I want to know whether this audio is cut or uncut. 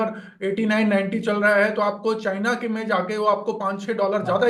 uncut